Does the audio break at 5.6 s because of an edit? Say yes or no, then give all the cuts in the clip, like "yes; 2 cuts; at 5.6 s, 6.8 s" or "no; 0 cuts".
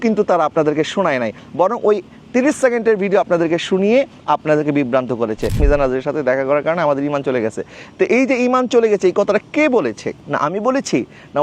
yes; 2 cuts; at 5.6 s, 10.1 s